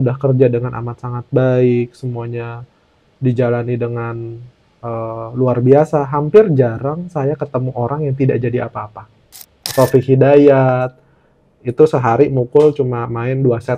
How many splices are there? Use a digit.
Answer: 1